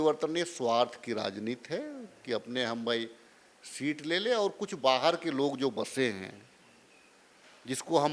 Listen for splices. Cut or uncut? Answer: uncut